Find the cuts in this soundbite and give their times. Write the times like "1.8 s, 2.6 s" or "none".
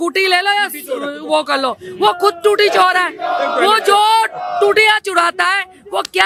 none

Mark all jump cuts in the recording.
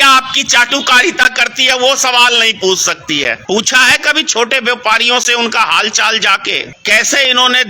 3.4 s, 6.7 s

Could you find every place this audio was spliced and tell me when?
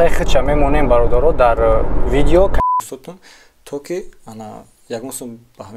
2.6 s

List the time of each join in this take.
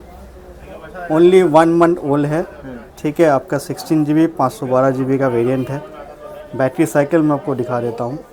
none

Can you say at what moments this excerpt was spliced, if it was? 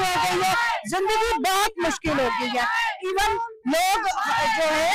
none

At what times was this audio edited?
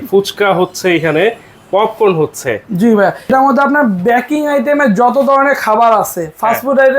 3.3 s

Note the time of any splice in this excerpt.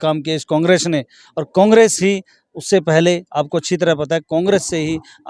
none

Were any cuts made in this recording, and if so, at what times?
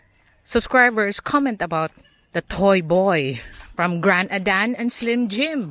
none

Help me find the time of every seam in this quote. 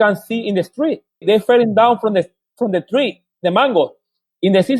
1.1 s

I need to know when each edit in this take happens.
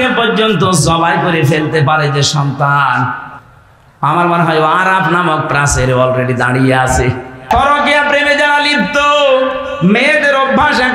7.5 s

